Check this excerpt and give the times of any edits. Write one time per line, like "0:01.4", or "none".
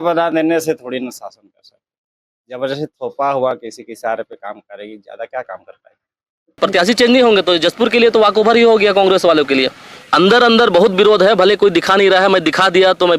0:06.6
0:10.0